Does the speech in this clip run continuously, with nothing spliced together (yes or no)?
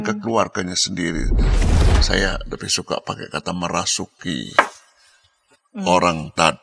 no